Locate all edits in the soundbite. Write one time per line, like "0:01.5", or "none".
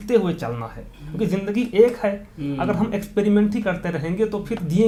none